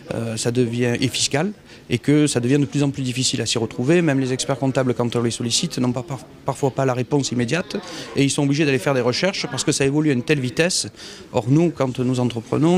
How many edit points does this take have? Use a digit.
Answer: 1